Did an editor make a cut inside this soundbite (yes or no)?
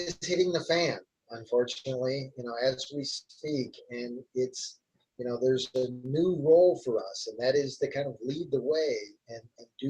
no